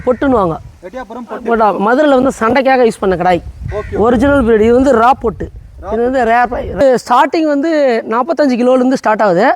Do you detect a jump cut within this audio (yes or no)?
yes